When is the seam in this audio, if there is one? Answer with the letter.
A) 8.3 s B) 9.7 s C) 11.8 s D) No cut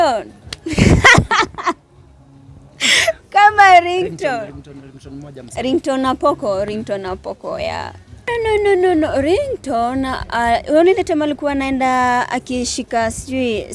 A